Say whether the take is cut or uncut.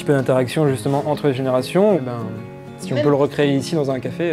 uncut